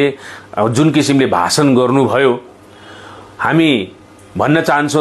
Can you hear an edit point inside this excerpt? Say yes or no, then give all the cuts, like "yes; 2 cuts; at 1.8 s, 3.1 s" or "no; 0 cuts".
no; 0 cuts